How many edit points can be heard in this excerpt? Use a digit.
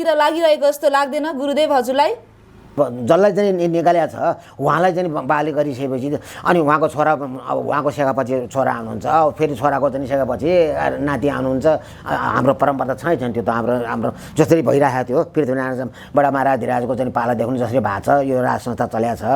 1